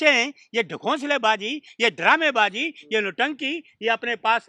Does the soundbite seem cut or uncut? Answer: uncut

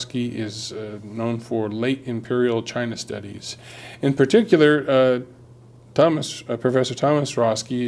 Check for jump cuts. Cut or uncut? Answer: cut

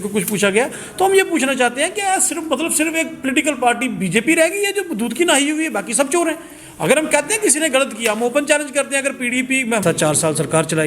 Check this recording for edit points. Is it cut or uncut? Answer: cut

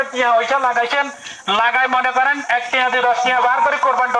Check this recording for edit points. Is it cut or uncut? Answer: uncut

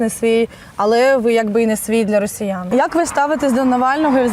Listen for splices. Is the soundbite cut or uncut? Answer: cut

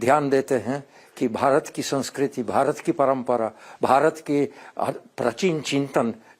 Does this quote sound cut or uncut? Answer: uncut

